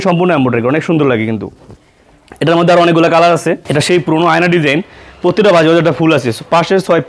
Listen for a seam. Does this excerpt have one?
yes; 1 cut; at 3.6 s

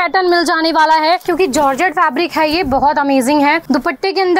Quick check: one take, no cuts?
no; 2 cuts; at 1.2 s, 3.6 s

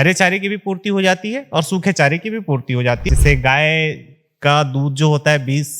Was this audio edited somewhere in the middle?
yes; 1 cut; at 3.1 s

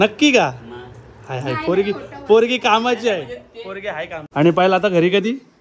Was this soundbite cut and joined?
yes; 1 cut; at 4.2 s

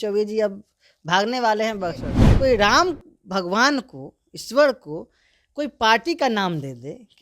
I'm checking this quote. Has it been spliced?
yes; 1 cut; at 2.2 s

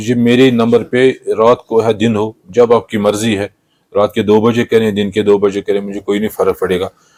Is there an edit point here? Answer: no; 0 cuts

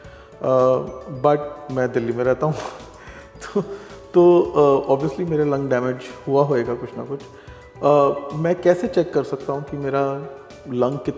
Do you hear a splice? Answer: no; 0 cuts

